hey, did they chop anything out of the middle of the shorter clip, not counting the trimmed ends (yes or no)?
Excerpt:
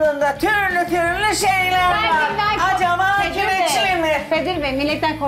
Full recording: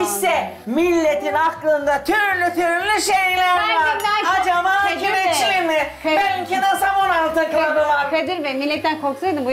yes